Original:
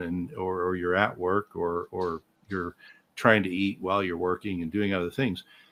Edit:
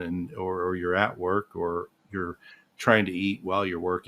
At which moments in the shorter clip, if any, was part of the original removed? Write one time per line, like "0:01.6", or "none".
0:01.9

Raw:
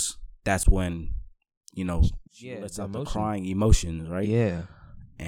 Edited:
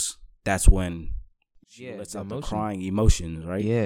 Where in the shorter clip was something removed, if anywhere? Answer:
0:01.6

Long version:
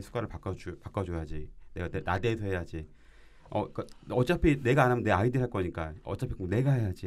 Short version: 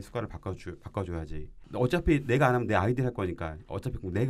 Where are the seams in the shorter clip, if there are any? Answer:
0:01.6

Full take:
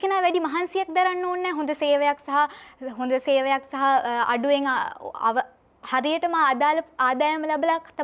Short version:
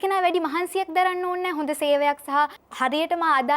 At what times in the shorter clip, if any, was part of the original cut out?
0:02.6

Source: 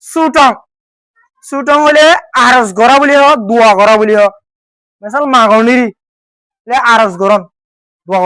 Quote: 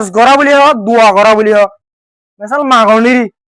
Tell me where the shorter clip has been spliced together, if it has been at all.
none

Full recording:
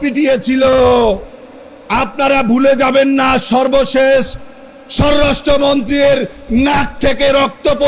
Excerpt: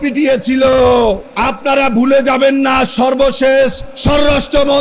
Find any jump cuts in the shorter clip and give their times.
0:01.3
0:03.9

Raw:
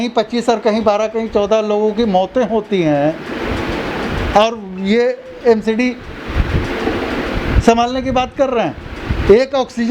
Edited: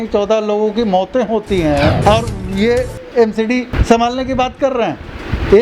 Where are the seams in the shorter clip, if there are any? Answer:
0:02.0
0:03.7

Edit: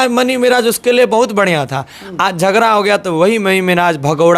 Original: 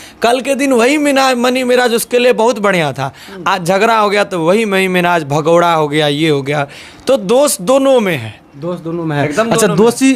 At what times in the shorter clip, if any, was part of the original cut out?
none

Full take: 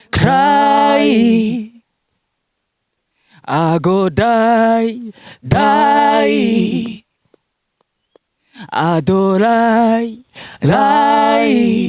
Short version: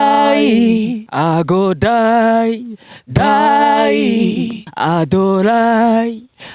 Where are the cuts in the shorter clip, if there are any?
0:01.0
0:04.6

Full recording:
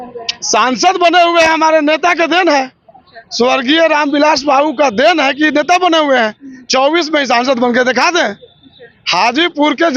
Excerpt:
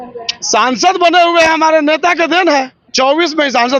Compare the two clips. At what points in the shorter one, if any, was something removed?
0:02.8

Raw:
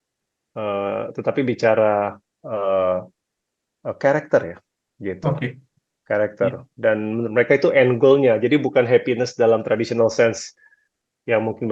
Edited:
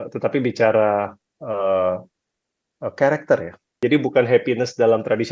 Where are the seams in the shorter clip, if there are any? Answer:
0:03.8

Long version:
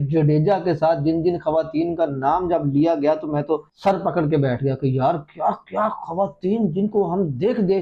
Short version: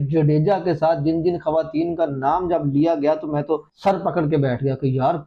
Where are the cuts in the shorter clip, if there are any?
none

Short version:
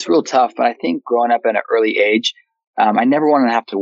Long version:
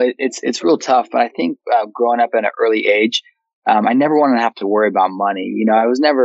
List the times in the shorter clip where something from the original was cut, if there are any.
0:01.0

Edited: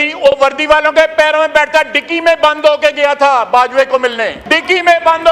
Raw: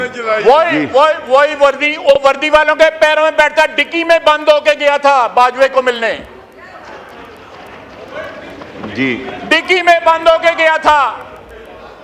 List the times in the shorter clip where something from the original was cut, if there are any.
0:04.4

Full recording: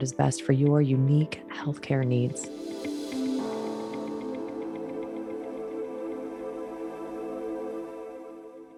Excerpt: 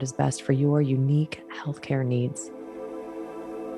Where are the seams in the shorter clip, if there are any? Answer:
0:02.4

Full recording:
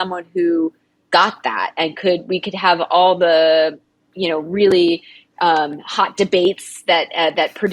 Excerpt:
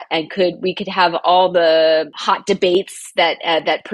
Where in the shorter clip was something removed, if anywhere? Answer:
0:02.2

